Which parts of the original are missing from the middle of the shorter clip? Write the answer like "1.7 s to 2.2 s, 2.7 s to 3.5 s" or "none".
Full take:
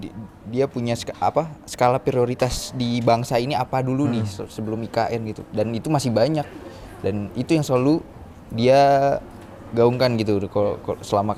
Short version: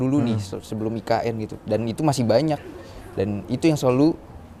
none